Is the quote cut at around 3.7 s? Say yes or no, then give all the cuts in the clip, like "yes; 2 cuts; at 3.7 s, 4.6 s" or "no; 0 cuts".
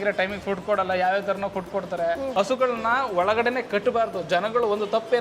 no; 1 cut; at 2.3 s